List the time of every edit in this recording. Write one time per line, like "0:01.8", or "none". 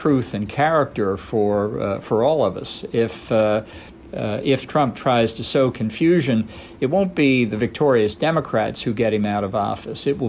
none